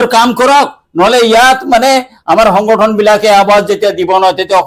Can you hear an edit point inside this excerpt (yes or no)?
no